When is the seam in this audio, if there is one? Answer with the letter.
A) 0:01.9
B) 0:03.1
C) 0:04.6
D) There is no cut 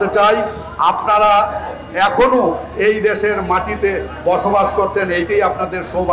D